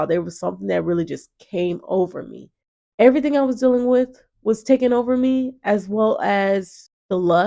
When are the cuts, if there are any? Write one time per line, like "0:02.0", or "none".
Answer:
0:02.9